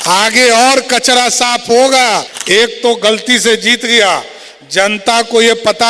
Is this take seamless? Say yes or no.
no